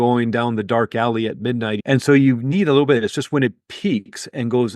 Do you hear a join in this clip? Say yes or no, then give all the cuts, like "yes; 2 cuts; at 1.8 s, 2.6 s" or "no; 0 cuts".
yes; 1 cut; at 1.8 s